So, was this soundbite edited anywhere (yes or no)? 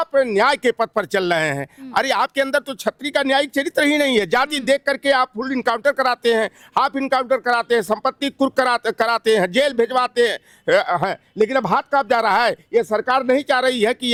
no